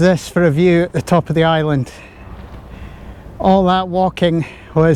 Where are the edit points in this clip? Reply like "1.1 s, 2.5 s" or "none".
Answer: none